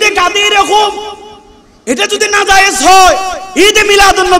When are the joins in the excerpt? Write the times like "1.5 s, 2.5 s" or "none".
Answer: none